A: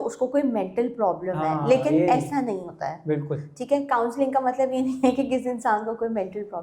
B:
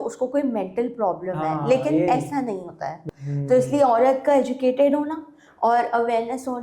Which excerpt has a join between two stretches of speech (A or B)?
B